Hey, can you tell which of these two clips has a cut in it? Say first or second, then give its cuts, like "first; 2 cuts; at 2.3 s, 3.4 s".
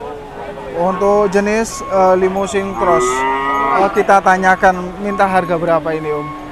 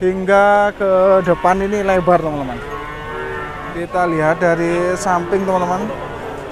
second; 1 cut; at 3.7 s